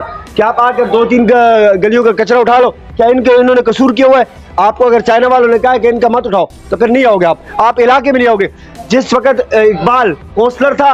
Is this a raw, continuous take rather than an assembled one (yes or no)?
yes